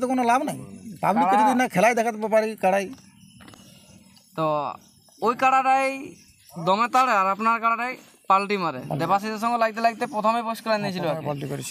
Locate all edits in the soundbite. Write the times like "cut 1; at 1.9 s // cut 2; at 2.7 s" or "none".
none